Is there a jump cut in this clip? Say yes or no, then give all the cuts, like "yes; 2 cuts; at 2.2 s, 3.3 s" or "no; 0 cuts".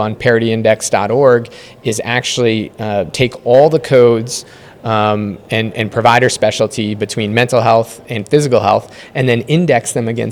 no; 0 cuts